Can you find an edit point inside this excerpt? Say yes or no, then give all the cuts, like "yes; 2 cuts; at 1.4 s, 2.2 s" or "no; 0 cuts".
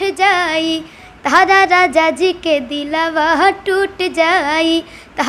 no; 0 cuts